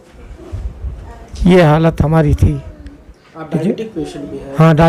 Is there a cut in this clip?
no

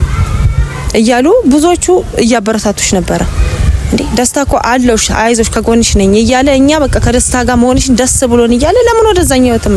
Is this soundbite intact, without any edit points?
yes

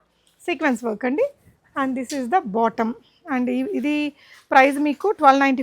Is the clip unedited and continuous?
yes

